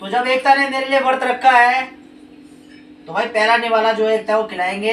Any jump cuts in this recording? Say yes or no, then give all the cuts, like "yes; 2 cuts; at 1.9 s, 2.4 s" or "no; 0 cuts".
no; 0 cuts